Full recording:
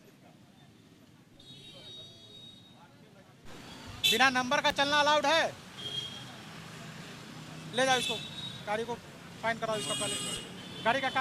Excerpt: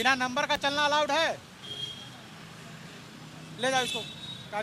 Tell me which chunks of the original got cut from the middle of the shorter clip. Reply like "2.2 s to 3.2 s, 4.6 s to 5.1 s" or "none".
none